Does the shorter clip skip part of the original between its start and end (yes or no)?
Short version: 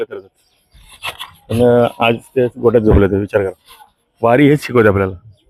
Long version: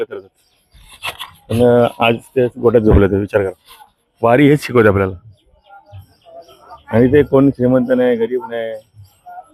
no